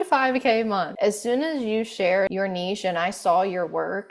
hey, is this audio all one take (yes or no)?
no